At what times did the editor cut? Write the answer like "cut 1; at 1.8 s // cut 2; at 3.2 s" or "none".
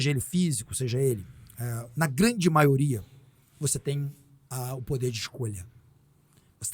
none